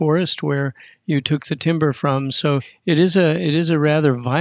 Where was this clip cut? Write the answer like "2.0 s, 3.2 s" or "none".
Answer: 2.7 s